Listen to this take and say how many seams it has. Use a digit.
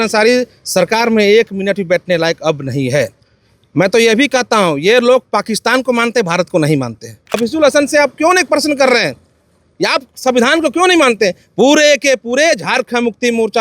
1